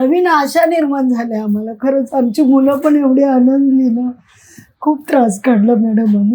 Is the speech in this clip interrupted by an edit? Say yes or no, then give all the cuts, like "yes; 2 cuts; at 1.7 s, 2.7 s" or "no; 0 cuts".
no; 0 cuts